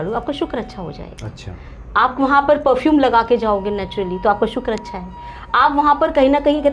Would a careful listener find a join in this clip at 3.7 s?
no; 0 cuts

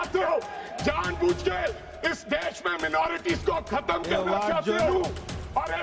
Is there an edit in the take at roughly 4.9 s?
yes; 1 cut; at 4.9 s

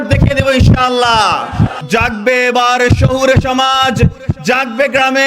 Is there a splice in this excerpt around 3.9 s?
no; 1 cut; at 1.8 s

